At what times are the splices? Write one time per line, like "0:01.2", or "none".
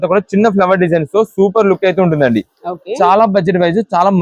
none